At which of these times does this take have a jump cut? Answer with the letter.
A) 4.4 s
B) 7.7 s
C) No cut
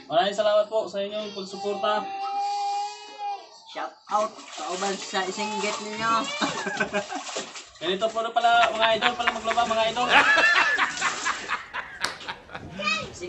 C